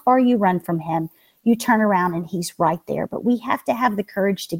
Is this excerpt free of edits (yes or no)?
yes